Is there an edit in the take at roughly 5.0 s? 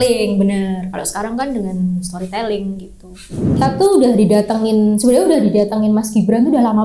no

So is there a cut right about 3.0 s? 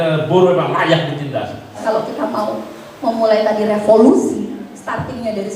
no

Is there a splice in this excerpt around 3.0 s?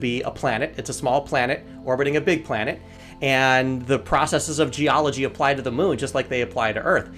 no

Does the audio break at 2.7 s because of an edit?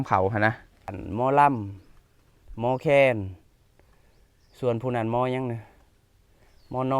no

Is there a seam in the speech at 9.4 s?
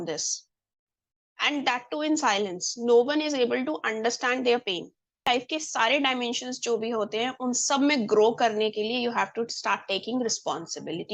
no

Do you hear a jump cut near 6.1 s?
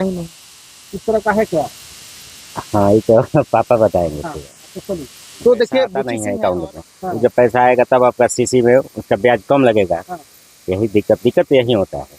yes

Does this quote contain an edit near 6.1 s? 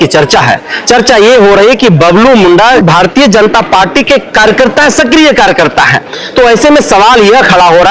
no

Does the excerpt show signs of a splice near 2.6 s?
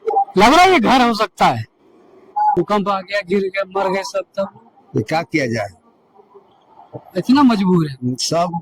yes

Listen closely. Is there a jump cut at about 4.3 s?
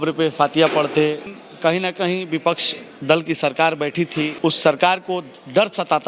yes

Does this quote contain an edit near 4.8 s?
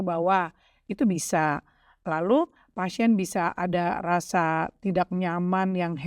no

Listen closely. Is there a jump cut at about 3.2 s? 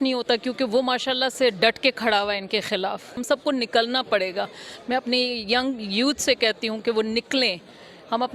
yes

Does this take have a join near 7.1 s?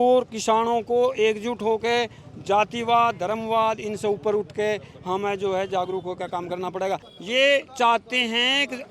yes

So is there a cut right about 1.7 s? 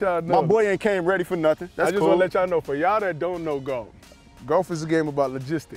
no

